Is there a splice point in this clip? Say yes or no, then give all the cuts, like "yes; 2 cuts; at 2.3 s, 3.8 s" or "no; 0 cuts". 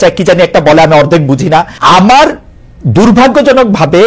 yes; 1 cut; at 1.7 s